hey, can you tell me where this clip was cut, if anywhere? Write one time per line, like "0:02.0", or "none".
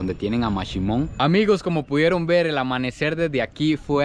0:01.1